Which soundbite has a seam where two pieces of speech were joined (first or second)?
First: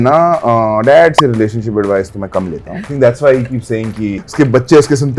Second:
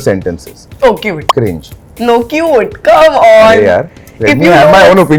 first